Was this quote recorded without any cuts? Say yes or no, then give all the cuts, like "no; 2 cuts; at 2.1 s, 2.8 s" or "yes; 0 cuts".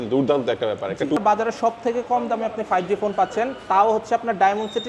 no; 1 cut; at 1.2 s